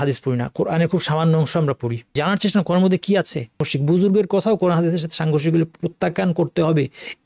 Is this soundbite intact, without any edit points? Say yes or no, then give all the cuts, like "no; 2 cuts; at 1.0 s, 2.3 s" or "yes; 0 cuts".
no; 2 cuts; at 2.1 s, 3.7 s